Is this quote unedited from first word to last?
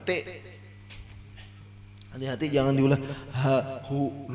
yes; 0 cuts

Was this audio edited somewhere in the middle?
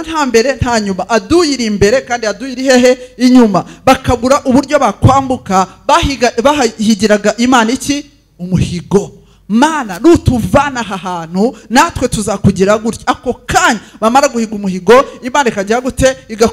no; 0 cuts

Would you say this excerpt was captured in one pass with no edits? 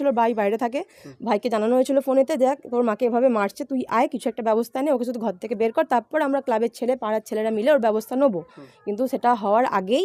yes; 0 cuts

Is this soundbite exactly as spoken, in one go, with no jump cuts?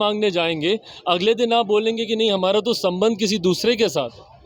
yes; 0 cuts

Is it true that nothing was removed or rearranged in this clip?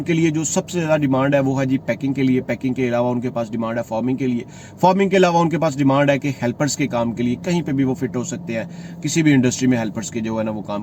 yes; 0 cuts

